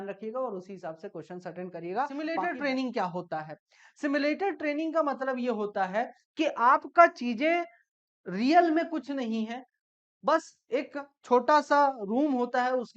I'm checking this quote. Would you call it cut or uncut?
cut